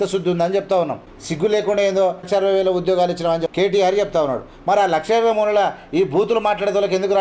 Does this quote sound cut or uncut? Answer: cut